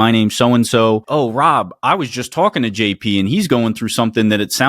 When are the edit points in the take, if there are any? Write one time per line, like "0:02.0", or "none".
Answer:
0:01.1